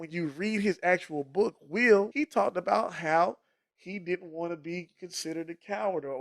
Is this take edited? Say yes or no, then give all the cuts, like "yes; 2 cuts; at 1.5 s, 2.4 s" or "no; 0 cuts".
yes; 1 cut; at 2.1 s